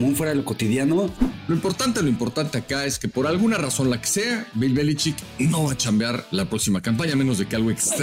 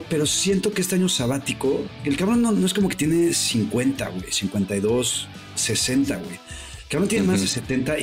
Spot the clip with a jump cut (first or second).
first